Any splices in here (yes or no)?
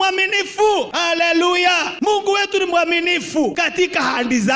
yes